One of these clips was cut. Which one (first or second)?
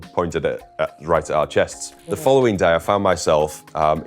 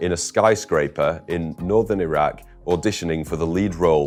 first